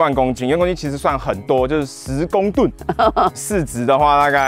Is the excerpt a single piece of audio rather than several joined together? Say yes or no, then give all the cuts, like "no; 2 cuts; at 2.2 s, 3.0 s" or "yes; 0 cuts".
no; 1 cut; at 3.3 s